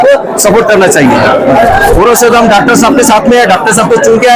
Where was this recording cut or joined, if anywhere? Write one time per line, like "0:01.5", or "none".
0:01.6

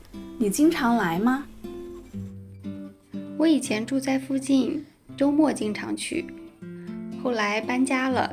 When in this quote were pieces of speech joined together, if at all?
0:01.5
0:02.8

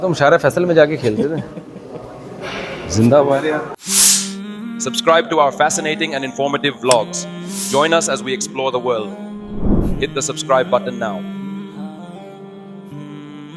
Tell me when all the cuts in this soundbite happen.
0:03.7

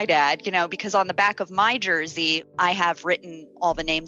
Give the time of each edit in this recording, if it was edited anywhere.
0:02.5

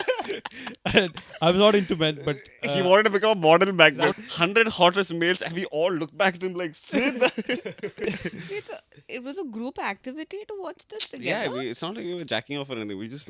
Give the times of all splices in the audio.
0:04.1
0:08.0

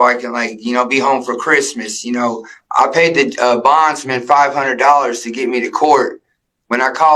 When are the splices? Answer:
0:02.6

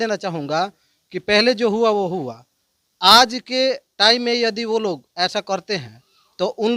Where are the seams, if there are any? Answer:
none

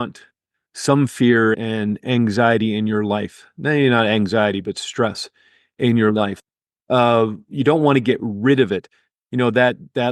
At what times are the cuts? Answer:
0:01.6

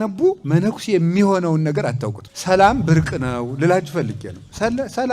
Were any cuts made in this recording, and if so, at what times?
0:02.2

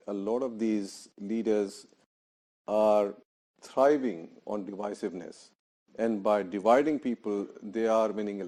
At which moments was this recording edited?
none

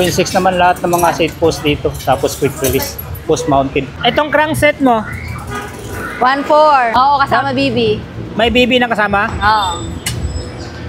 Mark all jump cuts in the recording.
0:04.1
0:06.9

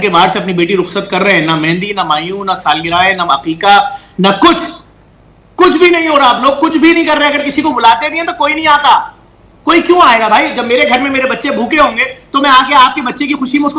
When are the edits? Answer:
none

